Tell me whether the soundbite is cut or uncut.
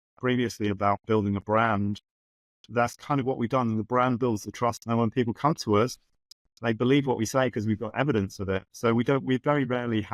uncut